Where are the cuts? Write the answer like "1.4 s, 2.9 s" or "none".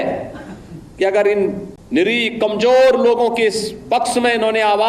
1.7 s